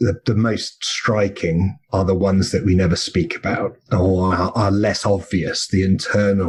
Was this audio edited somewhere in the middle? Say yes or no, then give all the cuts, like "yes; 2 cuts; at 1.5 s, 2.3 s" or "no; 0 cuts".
no; 0 cuts